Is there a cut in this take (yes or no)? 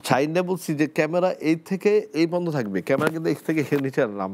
no